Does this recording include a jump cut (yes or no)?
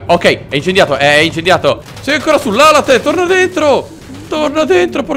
yes